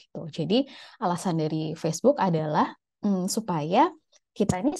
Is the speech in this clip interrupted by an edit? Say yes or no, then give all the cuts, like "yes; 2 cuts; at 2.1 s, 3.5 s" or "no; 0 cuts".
no; 0 cuts